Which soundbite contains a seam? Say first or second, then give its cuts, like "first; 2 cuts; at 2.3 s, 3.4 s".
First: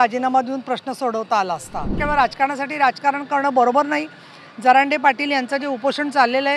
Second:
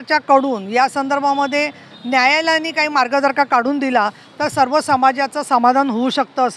first; 1 cut; at 2.0 s